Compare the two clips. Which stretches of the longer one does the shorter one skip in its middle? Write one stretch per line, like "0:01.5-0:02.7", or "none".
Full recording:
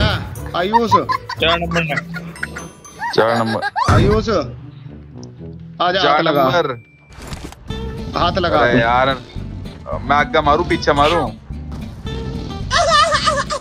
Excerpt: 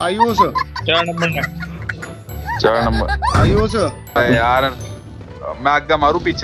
0:04.7-0:08.6